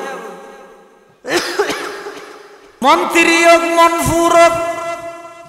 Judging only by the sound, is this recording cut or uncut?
cut